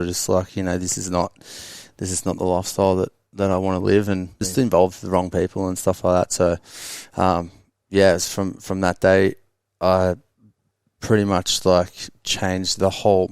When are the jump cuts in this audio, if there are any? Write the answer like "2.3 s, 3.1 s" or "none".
4.5 s